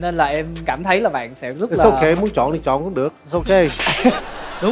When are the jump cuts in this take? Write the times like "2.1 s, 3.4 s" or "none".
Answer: none